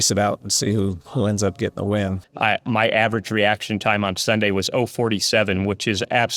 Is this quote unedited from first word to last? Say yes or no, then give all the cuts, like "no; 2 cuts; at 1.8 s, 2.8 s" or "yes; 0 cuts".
no; 1 cut; at 2.2 s